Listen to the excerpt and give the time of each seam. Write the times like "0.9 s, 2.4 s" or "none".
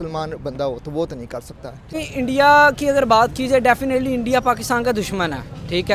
1.9 s